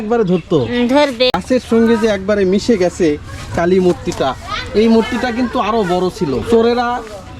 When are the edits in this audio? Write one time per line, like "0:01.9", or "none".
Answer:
0:01.3
0:06.4